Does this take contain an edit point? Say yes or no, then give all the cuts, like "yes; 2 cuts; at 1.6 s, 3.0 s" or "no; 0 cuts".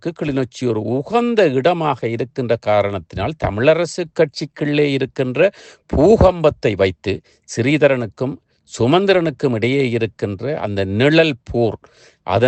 no; 0 cuts